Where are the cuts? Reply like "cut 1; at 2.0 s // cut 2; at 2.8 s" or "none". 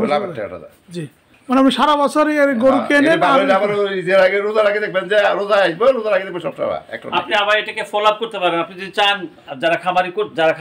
cut 1; at 1.3 s